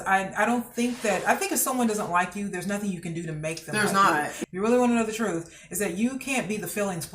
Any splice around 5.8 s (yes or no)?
no